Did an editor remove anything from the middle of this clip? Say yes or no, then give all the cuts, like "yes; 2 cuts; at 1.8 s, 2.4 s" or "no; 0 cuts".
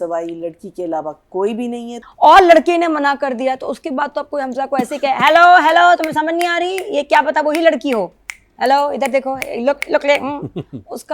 yes; 1 cut; at 2.0 s